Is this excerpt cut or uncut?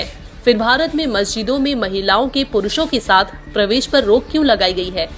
uncut